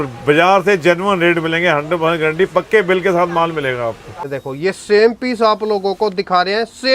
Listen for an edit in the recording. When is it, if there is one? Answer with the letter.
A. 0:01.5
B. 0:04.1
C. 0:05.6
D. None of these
B